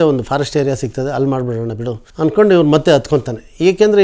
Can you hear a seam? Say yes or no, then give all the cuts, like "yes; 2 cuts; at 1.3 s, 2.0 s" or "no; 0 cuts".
yes; 1 cut; at 2.0 s